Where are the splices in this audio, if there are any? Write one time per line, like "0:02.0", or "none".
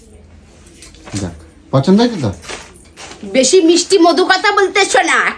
none